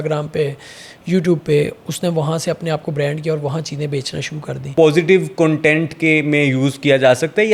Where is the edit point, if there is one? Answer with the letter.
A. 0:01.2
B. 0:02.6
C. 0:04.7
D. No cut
C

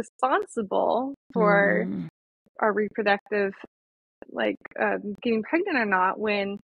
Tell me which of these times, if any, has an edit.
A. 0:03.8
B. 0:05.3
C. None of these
C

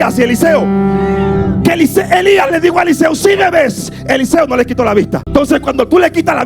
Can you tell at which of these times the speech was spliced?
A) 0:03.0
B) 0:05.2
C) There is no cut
B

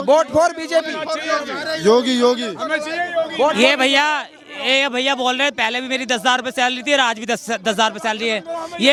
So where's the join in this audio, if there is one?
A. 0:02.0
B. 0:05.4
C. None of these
C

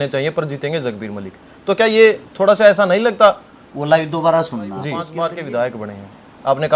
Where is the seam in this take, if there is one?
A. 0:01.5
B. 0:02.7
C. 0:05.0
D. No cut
C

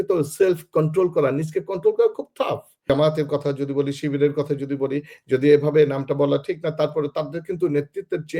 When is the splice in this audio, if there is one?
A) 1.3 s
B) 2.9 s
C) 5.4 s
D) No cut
B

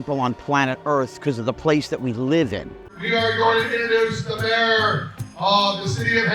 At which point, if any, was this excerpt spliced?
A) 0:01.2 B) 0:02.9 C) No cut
B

